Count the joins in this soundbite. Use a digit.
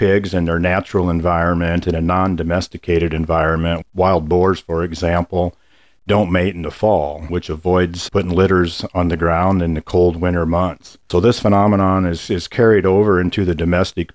3